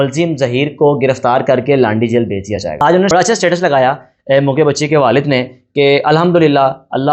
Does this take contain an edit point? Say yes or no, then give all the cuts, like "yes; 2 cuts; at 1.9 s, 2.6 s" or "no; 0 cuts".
yes; 1 cut; at 2.8 s